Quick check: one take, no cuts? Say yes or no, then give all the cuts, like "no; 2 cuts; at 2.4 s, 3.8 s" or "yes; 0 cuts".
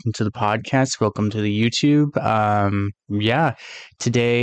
yes; 0 cuts